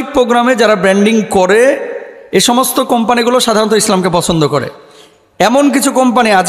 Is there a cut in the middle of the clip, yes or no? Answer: no